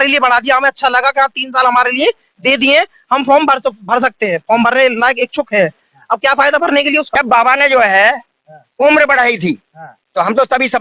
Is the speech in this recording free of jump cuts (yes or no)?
no